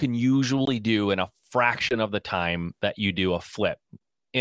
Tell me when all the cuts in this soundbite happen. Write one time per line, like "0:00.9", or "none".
none